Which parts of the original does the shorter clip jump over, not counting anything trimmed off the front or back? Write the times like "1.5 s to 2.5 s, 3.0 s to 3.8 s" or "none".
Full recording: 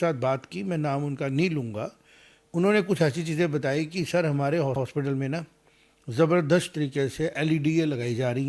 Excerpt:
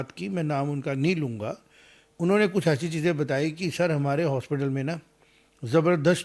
4.7 s to 4.8 s